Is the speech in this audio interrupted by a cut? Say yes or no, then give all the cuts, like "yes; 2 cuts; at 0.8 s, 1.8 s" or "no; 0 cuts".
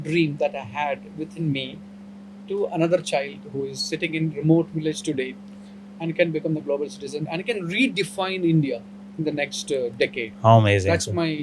no; 0 cuts